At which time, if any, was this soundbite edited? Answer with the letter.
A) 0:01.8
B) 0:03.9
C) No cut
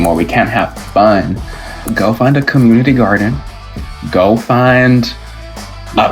A